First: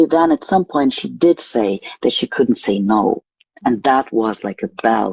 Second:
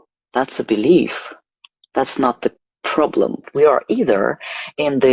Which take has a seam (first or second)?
second